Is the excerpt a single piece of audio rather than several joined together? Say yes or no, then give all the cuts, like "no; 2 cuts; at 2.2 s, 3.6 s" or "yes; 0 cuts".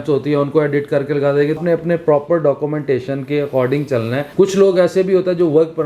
no; 2 cuts; at 1.6 s, 4.3 s